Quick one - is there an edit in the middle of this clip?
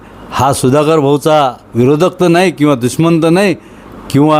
no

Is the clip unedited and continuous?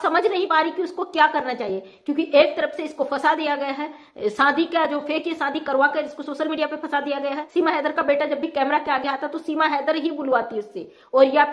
no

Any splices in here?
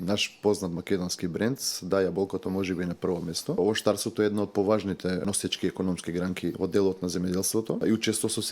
yes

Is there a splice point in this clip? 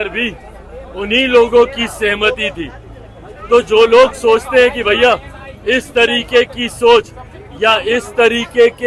no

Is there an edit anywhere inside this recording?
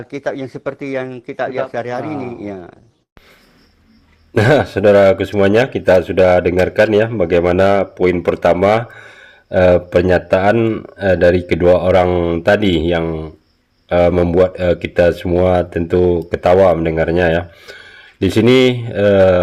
no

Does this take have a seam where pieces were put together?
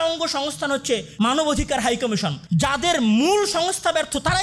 yes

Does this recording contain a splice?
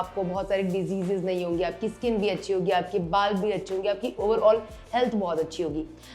yes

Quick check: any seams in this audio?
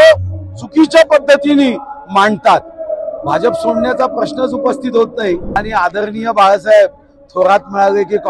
yes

